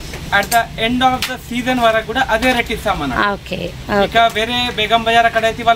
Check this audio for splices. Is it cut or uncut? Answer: uncut